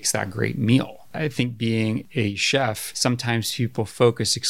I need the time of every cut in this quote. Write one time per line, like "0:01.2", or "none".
0:01.1
0:02.1
0:02.9